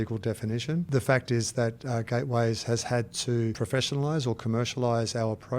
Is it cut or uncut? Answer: cut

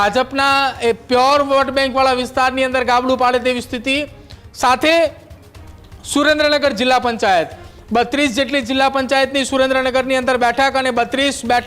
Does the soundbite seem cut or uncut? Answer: uncut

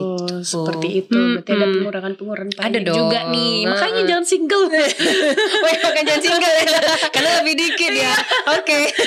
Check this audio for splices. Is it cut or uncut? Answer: uncut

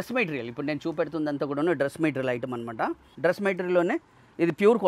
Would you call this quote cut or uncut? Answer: cut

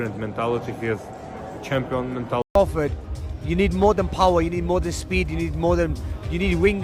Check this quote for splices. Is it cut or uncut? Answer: cut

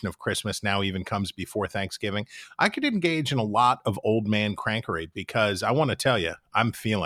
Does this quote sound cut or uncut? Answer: uncut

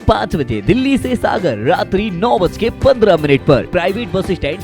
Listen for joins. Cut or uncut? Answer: cut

